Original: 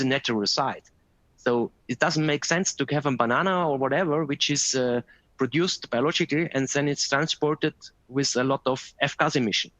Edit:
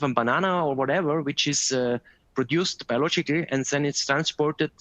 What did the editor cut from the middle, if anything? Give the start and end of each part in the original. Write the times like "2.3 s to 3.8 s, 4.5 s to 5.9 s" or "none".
none